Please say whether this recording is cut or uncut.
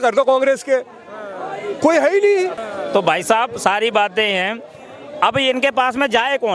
cut